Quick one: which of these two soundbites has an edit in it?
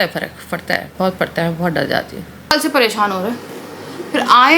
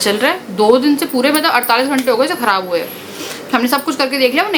first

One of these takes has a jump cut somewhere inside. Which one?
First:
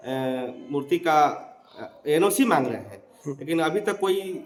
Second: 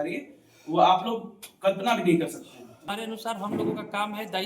second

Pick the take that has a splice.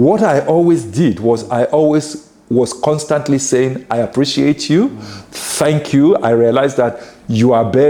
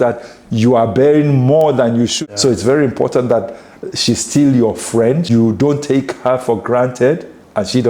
second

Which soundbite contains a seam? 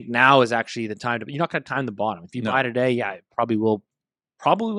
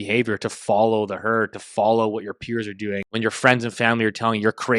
second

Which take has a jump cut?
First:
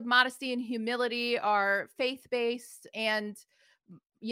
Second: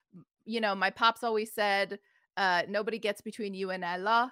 first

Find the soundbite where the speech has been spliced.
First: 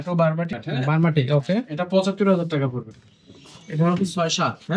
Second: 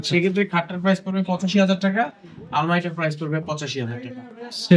first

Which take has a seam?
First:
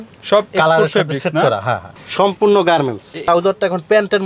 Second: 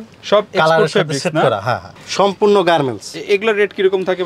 first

